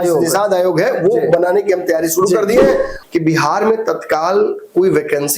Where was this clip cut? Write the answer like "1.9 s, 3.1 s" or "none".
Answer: 2.9 s